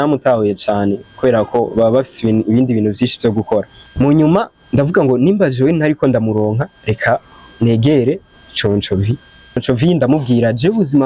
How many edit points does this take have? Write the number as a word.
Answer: two